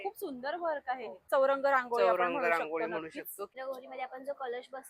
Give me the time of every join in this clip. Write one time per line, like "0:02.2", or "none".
0:01.3
0:03.5